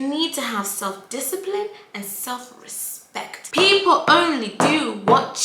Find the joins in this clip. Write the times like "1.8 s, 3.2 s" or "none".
3.4 s